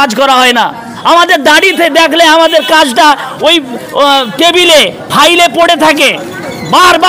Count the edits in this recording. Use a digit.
0